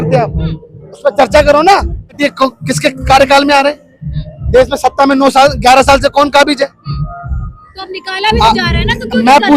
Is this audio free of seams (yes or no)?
no